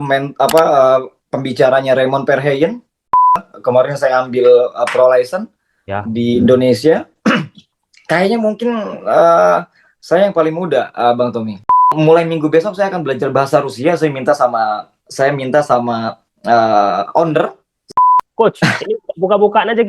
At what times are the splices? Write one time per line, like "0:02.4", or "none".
0:03.3
0:11.9
0:17.9